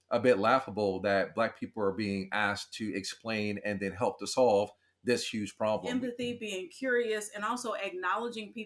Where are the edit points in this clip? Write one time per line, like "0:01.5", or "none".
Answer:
0:05.8